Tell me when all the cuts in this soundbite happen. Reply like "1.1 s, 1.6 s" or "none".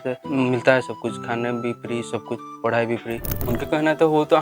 3.3 s